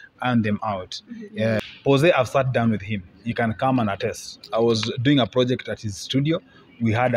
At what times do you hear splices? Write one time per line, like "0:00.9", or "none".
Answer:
0:01.7